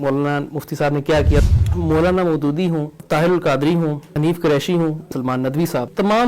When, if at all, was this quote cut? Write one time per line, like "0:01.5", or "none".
0:01.4
0:03.0
0:04.1
0:05.4